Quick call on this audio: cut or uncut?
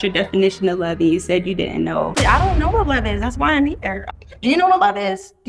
cut